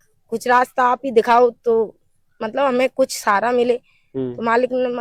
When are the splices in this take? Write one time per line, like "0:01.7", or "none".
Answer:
none